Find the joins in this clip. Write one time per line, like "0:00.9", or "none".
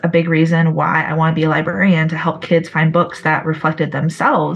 none